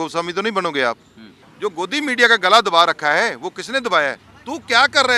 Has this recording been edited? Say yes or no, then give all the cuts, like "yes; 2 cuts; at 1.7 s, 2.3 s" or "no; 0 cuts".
yes; 2 cuts; at 1.4 s, 4.2 s